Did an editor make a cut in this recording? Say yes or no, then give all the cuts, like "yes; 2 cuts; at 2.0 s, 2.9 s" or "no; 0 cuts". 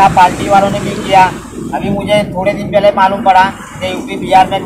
no; 0 cuts